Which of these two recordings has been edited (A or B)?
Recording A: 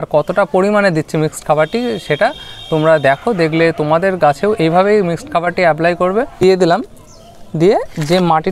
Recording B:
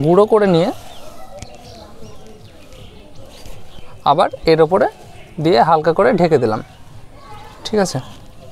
A